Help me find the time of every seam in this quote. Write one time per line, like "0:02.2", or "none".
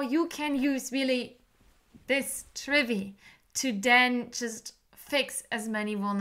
none